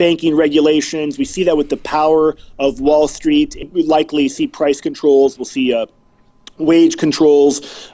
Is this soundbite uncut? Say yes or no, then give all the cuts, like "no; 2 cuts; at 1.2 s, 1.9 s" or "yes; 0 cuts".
no; 1 cut; at 3.6 s